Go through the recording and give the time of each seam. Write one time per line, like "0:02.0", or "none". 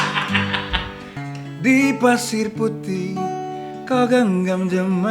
0:01.1